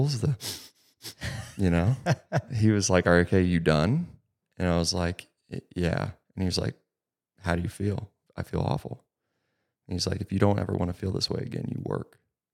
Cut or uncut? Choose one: cut